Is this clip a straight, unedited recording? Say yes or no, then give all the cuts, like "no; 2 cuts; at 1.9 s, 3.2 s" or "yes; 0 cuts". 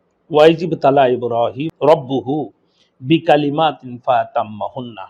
yes; 0 cuts